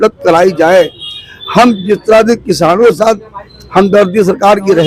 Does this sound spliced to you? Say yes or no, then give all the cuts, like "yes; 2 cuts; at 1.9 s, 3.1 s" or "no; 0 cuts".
no; 0 cuts